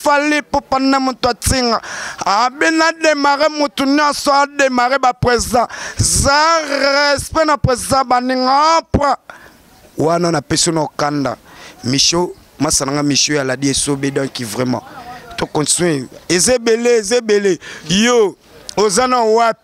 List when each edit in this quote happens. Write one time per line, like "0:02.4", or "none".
none